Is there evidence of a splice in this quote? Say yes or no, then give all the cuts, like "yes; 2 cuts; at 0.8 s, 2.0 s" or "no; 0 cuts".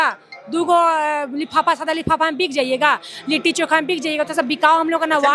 no; 0 cuts